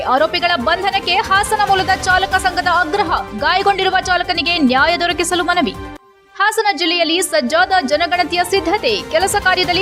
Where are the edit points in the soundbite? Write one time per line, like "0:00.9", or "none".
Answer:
none